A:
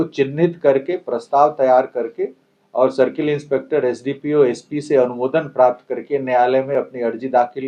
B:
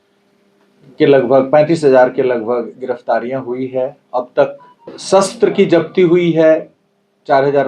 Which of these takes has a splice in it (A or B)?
B